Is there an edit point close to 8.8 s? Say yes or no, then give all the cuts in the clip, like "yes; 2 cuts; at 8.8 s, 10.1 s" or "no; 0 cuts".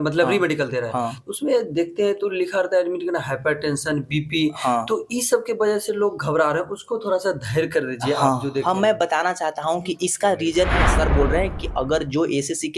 no; 1 cut; at 10.9 s